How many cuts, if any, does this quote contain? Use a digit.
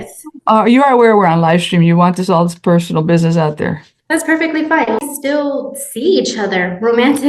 1